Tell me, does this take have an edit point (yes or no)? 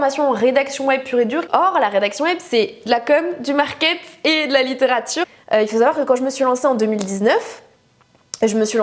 yes